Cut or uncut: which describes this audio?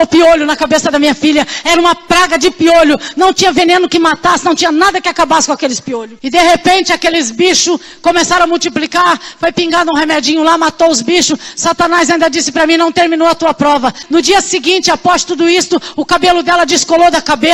cut